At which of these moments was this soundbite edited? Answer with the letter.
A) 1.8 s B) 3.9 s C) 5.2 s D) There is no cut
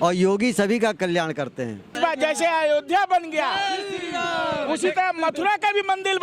A